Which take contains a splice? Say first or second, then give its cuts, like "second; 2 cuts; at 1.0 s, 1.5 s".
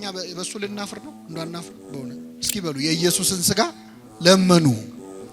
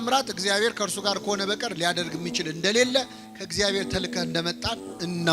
first; 1 cut; at 2.3 s